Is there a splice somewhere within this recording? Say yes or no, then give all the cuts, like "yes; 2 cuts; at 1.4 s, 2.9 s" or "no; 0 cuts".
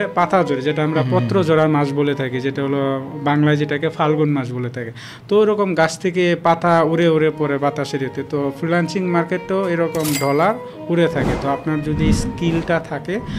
no; 0 cuts